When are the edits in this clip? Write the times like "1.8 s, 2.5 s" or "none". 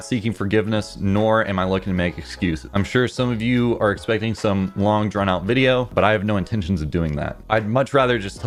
none

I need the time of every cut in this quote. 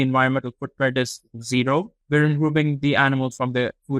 2.0 s

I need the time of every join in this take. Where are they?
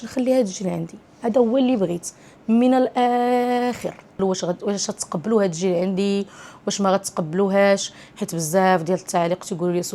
4.1 s

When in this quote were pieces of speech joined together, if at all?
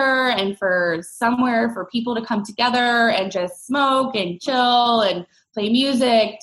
none

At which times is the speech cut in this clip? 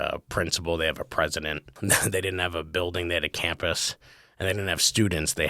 1.7 s

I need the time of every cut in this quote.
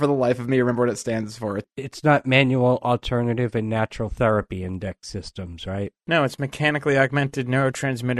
1.7 s

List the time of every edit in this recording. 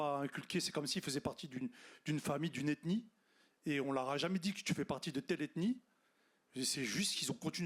none

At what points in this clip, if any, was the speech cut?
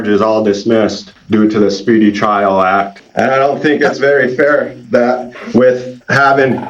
1.1 s, 3.0 s

